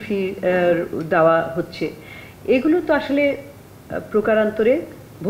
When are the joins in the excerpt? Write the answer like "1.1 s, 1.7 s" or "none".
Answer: none